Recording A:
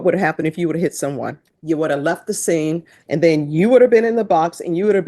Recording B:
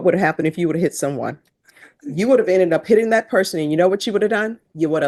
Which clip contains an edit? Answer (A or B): A